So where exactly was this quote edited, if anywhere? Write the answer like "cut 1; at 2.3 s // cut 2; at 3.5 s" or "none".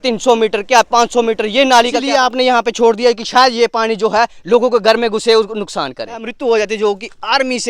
cut 1; at 2.0 s // cut 2; at 6.3 s